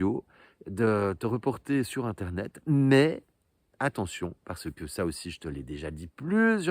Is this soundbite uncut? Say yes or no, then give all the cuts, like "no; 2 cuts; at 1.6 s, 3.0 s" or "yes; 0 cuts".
yes; 0 cuts